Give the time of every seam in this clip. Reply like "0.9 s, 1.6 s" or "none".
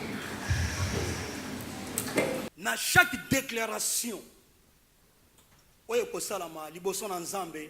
2.5 s